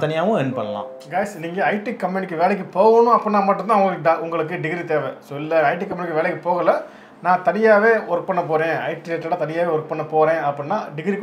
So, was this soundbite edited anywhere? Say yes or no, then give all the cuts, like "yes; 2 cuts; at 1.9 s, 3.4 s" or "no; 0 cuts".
yes; 1 cut; at 1.0 s